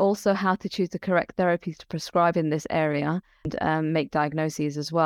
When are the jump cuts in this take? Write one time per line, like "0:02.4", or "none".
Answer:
0:03.8